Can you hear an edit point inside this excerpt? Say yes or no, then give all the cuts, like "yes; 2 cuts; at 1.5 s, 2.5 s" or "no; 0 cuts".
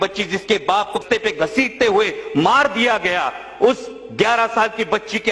yes; 1 cut; at 1.0 s